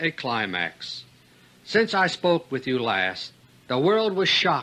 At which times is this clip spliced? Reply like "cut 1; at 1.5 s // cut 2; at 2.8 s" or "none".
cut 1; at 3.1 s